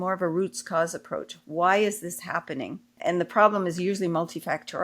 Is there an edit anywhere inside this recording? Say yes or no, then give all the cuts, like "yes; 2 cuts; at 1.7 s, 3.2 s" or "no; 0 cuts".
yes; 1 cut; at 2.9 s